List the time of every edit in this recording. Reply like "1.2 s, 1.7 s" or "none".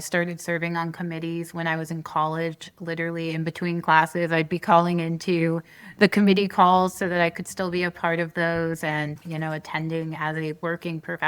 9.2 s